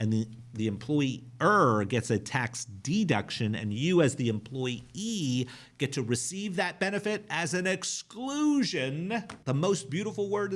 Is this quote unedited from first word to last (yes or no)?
no